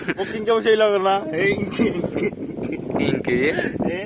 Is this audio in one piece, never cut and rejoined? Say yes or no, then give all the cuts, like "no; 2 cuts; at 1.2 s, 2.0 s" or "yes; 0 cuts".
yes; 0 cuts